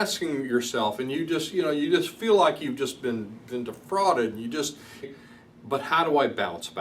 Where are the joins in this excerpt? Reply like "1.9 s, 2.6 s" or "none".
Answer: 5.1 s

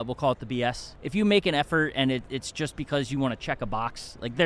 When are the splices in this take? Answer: 0.9 s

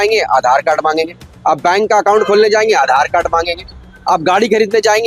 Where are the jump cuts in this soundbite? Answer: none

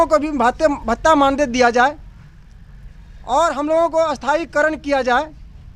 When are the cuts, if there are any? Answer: none

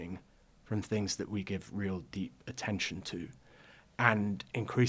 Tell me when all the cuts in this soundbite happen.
none

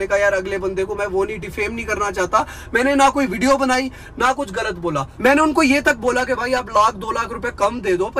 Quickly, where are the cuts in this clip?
5.1 s

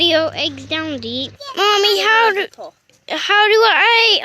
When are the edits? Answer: 1.3 s

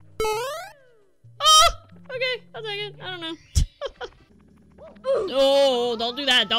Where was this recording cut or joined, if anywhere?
4.2 s

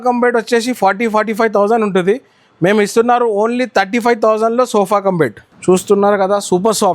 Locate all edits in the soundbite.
5.5 s

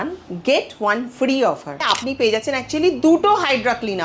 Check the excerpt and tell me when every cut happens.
1.8 s

